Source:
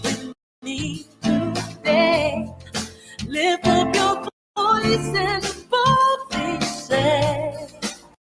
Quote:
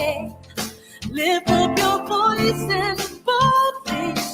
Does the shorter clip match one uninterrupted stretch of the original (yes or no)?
no